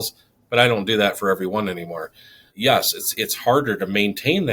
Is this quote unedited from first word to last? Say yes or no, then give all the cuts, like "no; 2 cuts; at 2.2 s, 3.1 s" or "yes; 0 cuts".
yes; 0 cuts